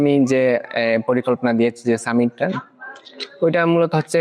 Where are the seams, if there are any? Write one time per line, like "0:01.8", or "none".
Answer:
none